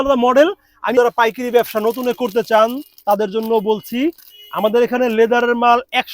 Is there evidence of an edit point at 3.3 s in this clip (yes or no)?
no